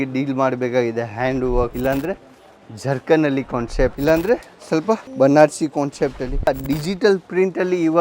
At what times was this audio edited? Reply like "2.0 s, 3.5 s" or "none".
1.7 s, 4.0 s, 5.1 s, 6.5 s